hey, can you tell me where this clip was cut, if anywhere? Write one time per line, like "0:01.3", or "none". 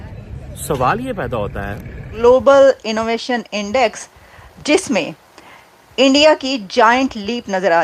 0:02.0